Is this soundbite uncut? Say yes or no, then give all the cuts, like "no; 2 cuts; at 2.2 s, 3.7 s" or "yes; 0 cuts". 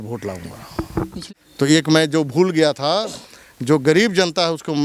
no; 1 cut; at 1.1 s